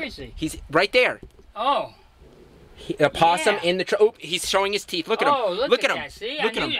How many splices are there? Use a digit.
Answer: 0